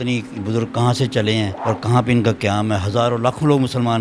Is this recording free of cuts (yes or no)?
yes